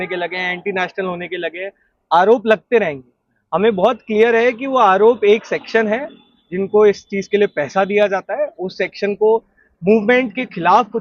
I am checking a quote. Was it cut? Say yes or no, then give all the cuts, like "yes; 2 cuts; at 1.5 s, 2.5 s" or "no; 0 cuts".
no; 0 cuts